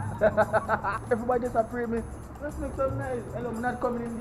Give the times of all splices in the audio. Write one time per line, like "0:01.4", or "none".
0:00.9